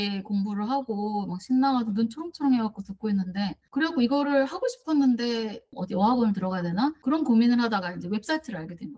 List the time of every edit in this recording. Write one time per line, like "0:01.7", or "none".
none